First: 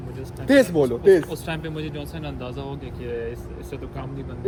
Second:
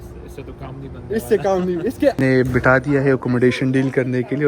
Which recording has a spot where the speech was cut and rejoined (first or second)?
second